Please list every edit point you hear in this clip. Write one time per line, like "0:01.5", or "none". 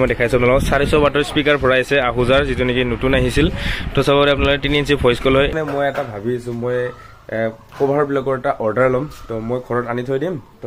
0:05.5